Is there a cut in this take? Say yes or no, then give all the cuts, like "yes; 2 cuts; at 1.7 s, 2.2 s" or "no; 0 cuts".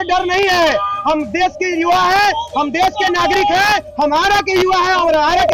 no; 0 cuts